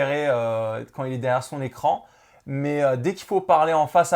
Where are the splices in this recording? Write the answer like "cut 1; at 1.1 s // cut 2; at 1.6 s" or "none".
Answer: none